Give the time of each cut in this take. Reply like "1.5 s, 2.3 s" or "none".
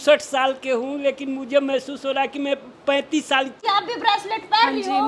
3.6 s

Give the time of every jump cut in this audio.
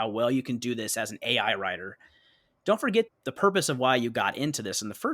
3.1 s

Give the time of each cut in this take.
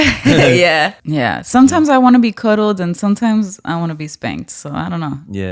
1.0 s

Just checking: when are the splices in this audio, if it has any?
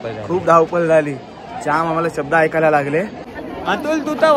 3.4 s

